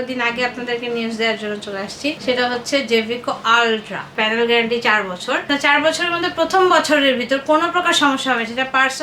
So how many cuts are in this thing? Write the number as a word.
three